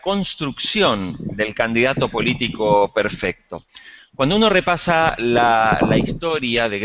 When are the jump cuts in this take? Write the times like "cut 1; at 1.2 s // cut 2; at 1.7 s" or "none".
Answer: none